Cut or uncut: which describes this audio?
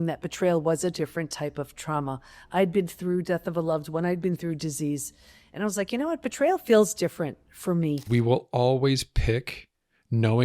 cut